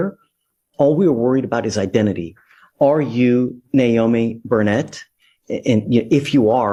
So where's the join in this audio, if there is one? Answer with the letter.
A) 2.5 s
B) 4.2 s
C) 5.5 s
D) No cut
D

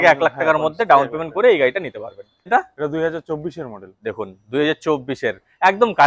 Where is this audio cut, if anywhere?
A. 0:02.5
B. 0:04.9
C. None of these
A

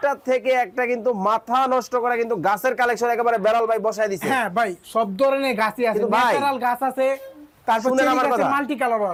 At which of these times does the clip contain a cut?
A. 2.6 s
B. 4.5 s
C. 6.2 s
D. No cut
D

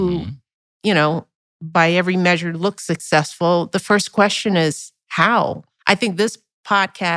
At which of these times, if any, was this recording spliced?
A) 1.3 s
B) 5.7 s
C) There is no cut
B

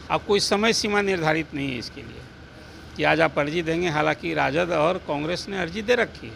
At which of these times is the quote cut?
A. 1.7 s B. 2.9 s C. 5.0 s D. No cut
D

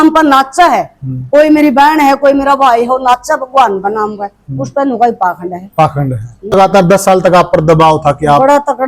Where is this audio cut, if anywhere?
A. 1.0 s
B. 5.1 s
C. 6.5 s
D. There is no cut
C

